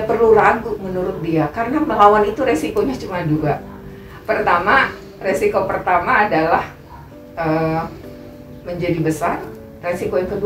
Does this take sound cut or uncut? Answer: uncut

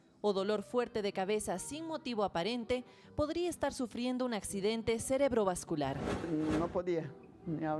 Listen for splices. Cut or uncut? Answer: cut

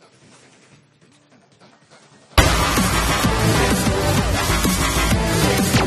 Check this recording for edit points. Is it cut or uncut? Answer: uncut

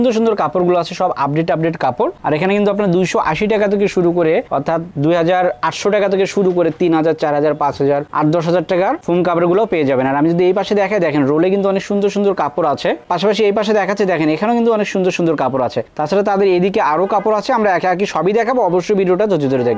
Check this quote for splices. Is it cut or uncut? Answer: uncut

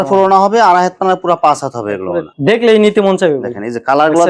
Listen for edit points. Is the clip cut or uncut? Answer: uncut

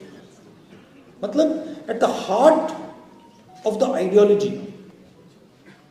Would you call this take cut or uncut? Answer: uncut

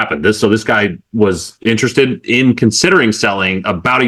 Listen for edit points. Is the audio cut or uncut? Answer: uncut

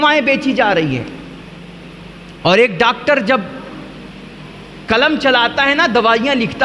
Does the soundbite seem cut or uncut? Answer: uncut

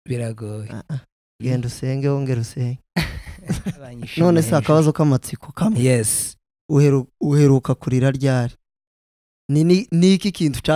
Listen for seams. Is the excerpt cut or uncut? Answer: cut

